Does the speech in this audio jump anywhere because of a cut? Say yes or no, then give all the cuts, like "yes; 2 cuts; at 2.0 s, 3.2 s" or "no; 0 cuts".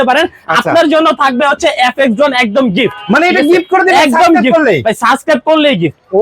no; 0 cuts